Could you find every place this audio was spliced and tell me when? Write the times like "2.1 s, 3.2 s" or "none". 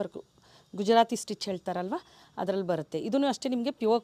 none